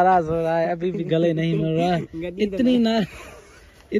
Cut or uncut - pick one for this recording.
uncut